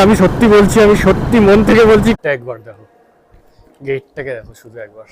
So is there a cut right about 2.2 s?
yes; 1 cut; at 2.2 s

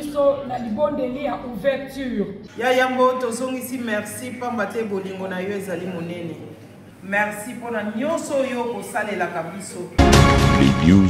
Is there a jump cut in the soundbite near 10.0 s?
yes; 1 cut; at 10.0 s

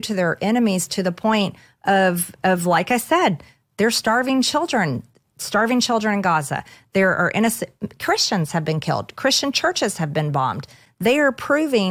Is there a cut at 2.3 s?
no; 0 cuts

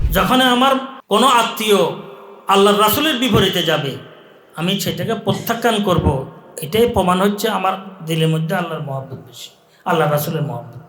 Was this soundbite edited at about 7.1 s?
no; 1 cut; at 0.9 s

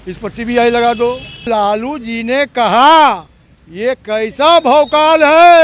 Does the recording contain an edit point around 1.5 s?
yes; 1 cut; at 1.5 s

